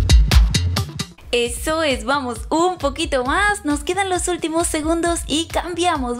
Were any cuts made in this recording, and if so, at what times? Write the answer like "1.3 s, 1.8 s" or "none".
1.0 s